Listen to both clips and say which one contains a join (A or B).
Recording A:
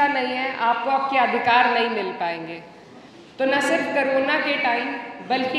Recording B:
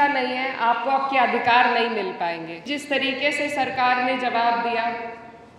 B